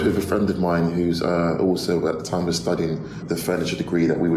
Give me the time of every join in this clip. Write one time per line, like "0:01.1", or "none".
0:03.1